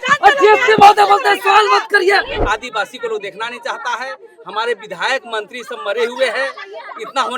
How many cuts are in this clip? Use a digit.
1